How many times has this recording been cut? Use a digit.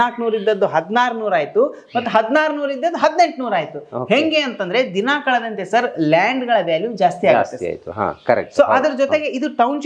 0